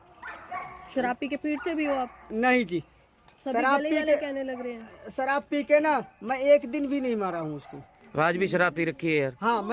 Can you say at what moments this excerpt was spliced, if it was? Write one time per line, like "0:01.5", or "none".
none